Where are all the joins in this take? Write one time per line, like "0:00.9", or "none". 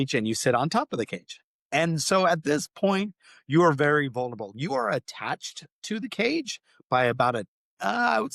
none